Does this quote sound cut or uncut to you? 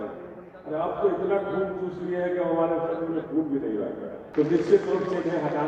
cut